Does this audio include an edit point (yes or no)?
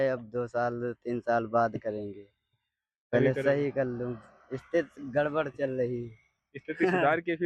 no